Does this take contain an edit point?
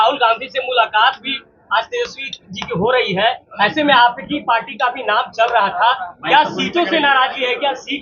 no; 0 cuts

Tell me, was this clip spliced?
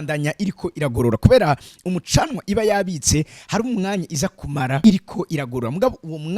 yes; 1 cut; at 4.8 s

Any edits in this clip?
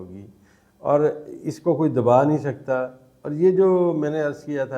no; 0 cuts

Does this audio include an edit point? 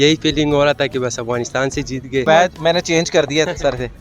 yes; 1 cut; at 2.3 s

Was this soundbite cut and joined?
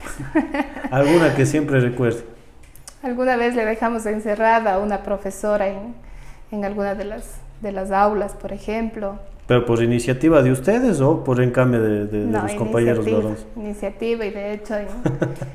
no; 0 cuts

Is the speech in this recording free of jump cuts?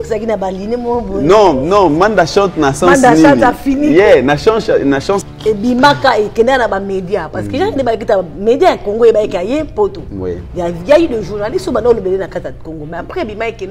no; 1 cut; at 5.2 s

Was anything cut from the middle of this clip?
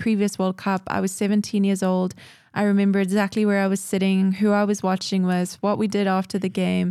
no; 0 cuts

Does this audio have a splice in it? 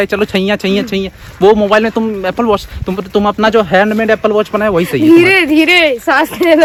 no; 0 cuts

